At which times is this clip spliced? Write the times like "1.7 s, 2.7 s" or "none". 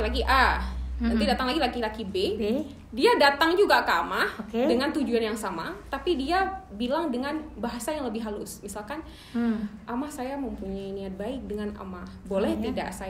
none